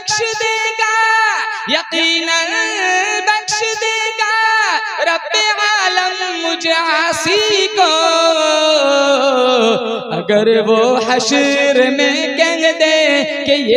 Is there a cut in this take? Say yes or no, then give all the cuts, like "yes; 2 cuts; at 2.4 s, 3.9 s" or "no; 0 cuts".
no; 0 cuts